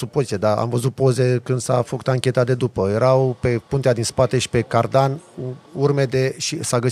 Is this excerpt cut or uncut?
uncut